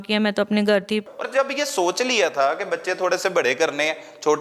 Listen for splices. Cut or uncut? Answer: cut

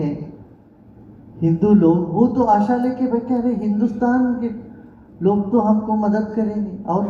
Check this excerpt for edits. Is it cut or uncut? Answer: uncut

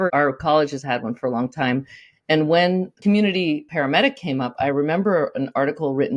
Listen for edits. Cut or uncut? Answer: cut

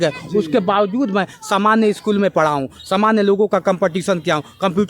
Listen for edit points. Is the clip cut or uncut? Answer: uncut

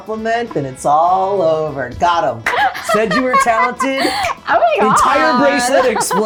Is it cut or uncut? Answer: uncut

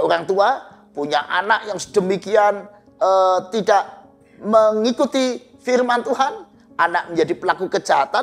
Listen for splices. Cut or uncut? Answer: uncut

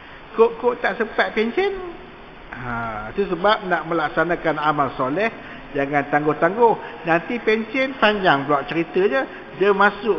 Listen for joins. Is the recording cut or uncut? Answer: uncut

